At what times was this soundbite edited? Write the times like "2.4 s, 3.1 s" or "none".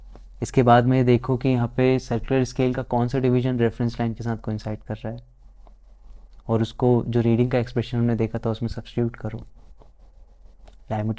none